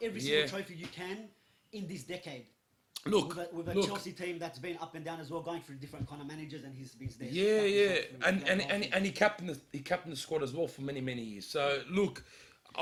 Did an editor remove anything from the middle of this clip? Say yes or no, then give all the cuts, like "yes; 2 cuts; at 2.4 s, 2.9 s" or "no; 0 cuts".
no; 0 cuts